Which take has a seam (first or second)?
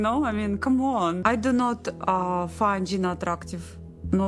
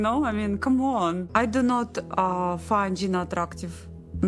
first